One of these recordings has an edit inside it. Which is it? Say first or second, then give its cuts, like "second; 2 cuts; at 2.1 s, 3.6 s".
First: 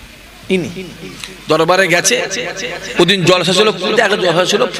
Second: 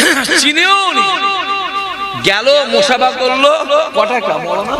first; 1 cut; at 2.8 s